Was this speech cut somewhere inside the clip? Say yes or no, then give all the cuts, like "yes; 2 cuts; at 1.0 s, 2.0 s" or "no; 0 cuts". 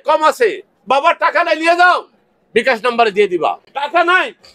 no; 0 cuts